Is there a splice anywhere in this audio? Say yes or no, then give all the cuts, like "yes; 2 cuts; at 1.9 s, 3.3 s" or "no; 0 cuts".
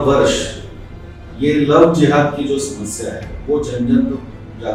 no; 0 cuts